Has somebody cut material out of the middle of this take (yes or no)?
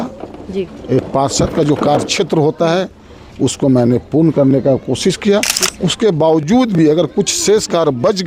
no